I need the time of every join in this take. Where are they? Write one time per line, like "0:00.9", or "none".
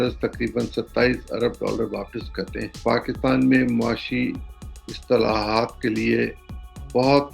0:02.7